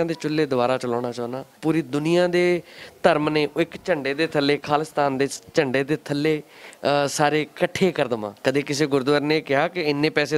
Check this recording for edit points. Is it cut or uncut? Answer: cut